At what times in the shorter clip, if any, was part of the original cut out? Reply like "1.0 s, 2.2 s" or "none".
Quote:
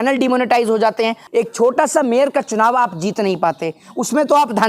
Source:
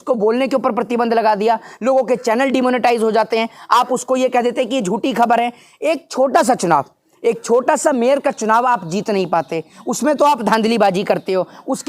1.2 s